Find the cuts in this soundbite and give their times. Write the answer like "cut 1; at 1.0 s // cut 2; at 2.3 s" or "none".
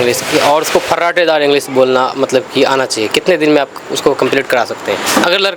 none